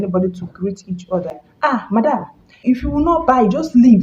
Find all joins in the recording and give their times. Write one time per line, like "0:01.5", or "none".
0:01.4
0:02.5